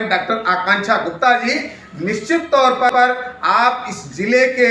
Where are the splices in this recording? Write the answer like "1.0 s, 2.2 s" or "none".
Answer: 2.9 s